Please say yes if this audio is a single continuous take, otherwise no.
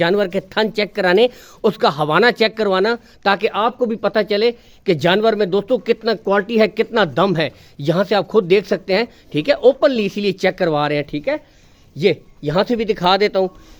yes